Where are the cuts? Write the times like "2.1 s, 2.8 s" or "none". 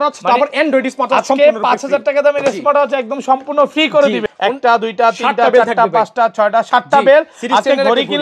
4.3 s